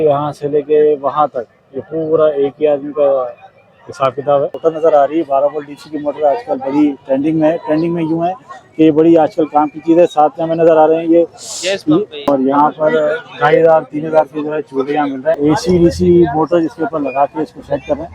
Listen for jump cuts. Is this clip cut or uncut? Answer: cut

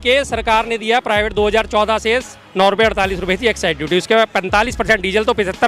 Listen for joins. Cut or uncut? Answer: uncut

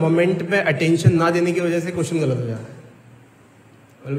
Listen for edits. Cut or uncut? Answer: uncut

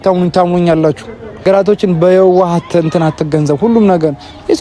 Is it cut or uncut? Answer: cut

